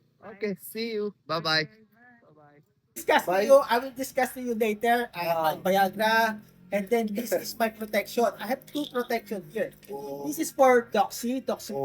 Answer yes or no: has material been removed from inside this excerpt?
yes